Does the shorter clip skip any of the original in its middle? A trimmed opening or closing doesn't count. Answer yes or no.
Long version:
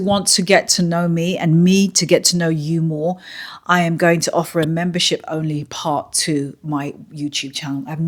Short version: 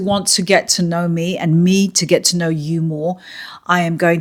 no